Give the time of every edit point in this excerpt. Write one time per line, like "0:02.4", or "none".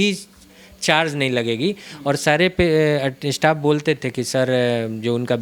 none

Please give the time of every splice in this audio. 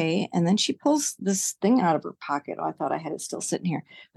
none

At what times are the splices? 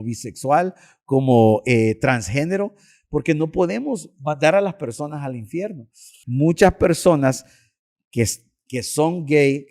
0:06.2

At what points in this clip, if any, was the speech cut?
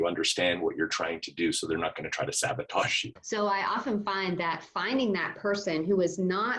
0:03.1

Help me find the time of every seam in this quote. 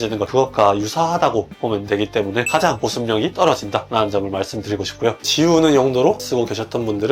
0:02.5
0:05.3
0:06.2

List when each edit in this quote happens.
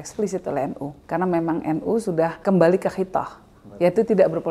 0:00.9
0:02.4

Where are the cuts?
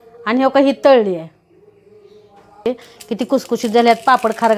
0:02.6

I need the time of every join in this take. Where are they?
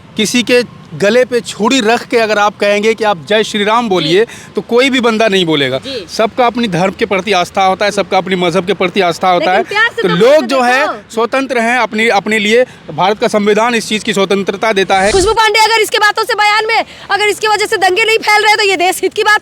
0:15.1

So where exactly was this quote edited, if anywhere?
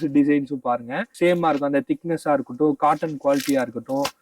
0:01.0

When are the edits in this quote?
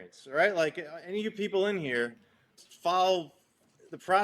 0:02.5

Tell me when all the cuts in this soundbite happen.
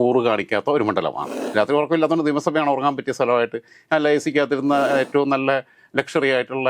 0:01.3

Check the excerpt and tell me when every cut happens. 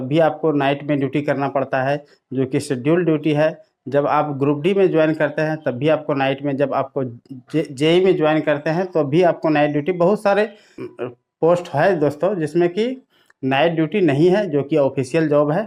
none

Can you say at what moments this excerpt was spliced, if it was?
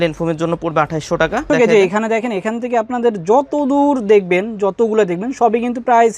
0:01.5

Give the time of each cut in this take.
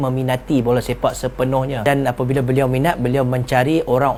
none

